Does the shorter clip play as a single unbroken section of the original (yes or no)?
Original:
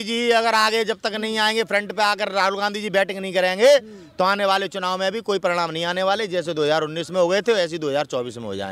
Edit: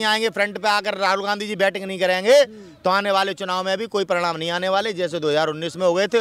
yes